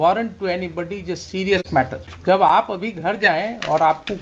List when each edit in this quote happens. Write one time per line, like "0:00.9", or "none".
0:02.1